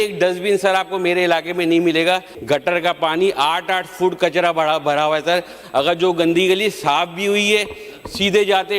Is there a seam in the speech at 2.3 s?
yes; 1 cut; at 2.3 s

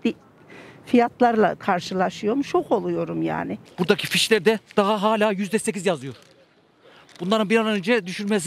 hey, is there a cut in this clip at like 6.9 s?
no; 1 cut; at 3.6 s

